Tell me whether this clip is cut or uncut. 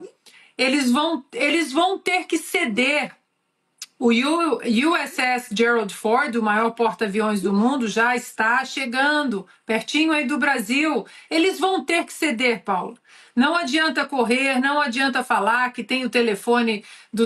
uncut